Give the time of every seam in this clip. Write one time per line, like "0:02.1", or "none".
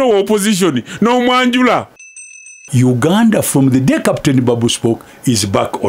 0:02.6